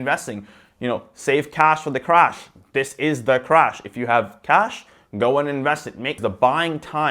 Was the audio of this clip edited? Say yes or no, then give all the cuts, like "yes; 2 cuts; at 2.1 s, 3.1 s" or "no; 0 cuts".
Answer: yes; 1 cut; at 6.2 s